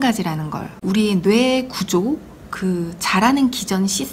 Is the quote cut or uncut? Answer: uncut